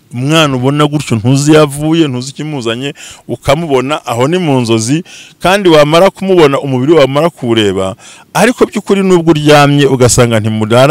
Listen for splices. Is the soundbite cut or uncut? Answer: uncut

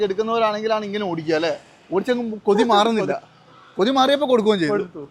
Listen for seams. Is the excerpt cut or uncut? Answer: uncut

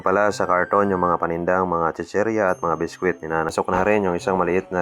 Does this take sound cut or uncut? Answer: cut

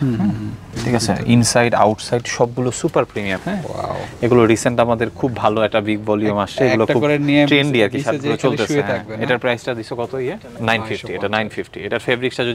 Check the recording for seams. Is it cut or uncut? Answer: cut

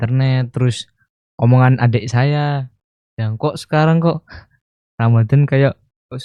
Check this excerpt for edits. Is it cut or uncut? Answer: uncut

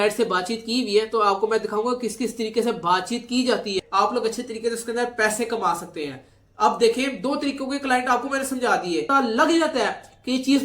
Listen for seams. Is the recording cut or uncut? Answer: cut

